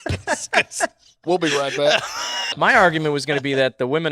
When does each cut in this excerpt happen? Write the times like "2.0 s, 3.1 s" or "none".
2.5 s